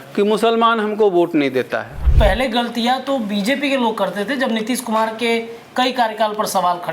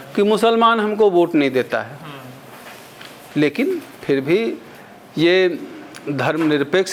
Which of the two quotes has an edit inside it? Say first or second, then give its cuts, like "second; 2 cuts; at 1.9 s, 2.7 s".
first; 1 cut; at 2.0 s